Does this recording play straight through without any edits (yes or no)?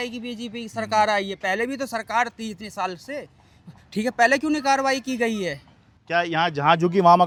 yes